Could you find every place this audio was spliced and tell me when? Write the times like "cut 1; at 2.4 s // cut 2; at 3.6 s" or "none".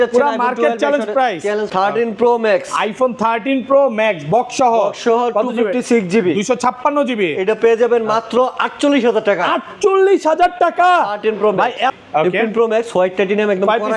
cut 1; at 1.7 s // cut 2; at 11.9 s